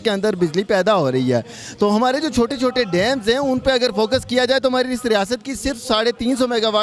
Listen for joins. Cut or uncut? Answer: uncut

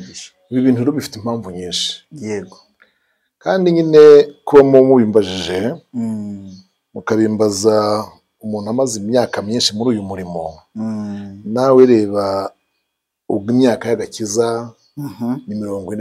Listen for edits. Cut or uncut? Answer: uncut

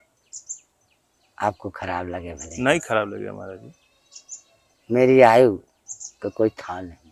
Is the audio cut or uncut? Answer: uncut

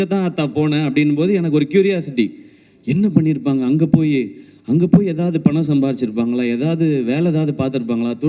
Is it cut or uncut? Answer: uncut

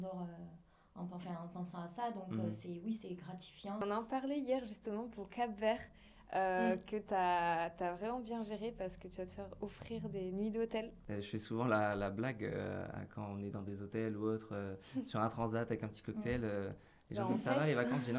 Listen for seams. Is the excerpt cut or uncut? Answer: cut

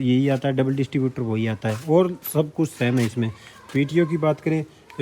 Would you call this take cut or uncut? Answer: uncut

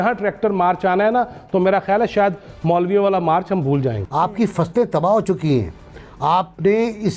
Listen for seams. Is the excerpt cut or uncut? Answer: cut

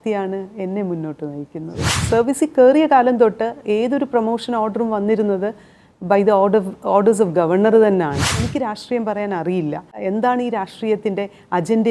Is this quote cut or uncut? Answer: cut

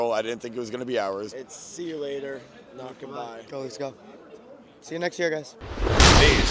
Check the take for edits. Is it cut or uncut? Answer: cut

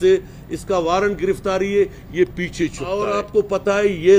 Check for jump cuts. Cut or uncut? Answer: cut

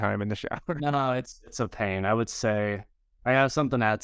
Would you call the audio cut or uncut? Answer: uncut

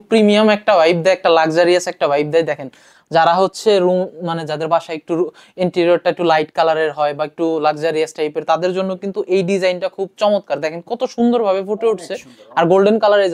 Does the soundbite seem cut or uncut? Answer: uncut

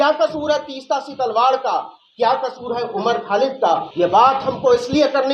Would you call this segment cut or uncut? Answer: cut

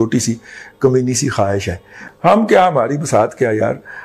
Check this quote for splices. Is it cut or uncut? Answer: cut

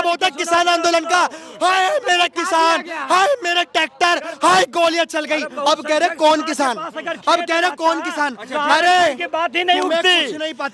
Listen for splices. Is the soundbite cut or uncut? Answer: uncut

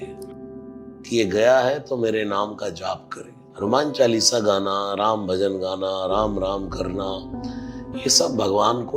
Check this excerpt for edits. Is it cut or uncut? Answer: uncut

